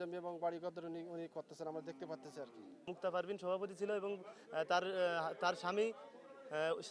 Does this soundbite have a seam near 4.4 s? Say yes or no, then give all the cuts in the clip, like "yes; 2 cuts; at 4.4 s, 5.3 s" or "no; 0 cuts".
no; 1 cut; at 2.9 s